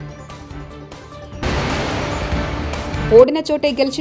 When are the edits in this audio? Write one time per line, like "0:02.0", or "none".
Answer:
0:01.2
0:03.1